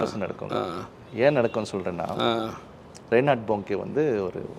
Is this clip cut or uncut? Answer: uncut